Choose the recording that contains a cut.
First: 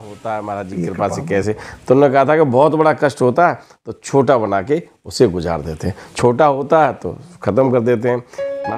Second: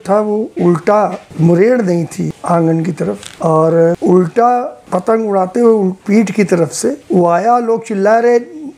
second; 5 cuts; at 1.2 s, 2.4 s, 3.3 s, 4.8 s, 7.0 s

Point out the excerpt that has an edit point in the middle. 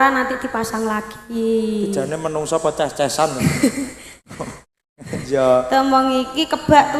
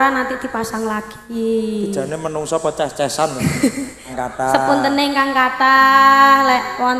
second; 1 cut; at 4.1 s

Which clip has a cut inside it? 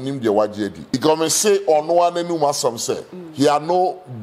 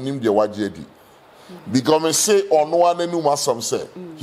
first; 1 cut; at 0.9 s

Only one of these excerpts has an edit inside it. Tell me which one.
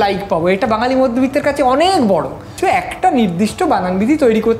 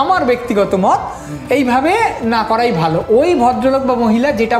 first; 1 cut; at 2.5 s

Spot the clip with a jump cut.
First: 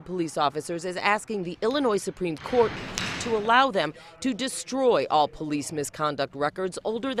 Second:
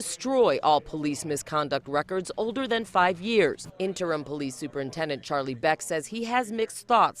second; 1 cut; at 3.7 s

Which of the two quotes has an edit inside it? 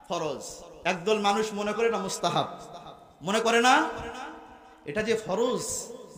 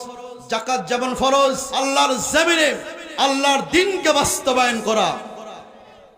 second; 1 cut; at 1.7 s

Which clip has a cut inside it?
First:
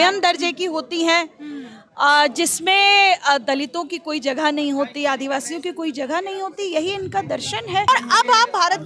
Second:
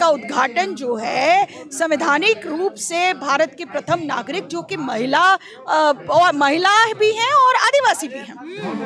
first; 1 cut; at 7.9 s

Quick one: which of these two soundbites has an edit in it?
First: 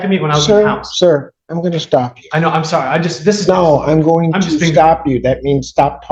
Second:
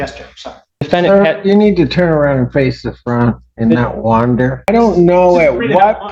second; 2 cuts; at 0.8 s, 4.7 s

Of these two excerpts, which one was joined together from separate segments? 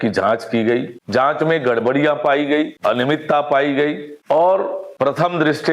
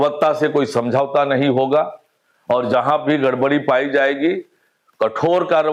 first; 4 cuts; at 1.0 s, 2.7 s, 4.1 s, 4.8 s

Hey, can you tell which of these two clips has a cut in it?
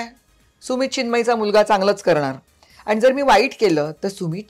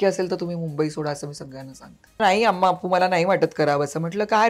second; 1 cut; at 2.2 s

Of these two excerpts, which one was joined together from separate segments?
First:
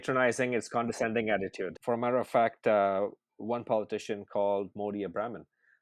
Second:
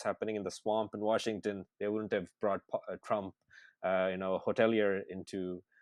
first; 1 cut; at 1.8 s

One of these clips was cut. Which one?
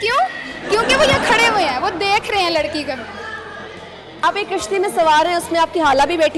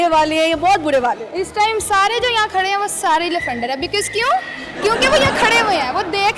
first; 1 cut; at 4.2 s

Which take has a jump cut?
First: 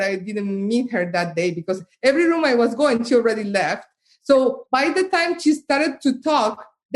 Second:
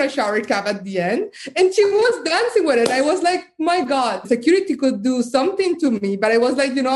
second; 1 cut; at 4.2 s

